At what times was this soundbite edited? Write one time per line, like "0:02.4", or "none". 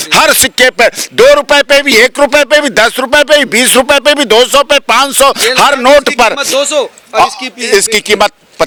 none